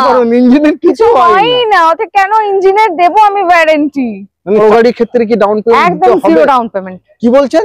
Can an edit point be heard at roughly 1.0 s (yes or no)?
no